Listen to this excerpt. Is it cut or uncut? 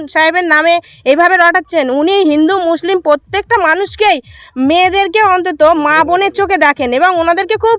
uncut